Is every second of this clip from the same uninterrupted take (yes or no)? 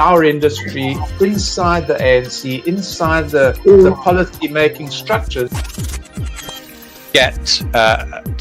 yes